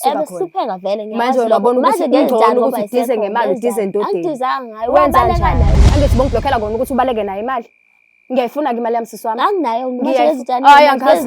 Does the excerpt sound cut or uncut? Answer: cut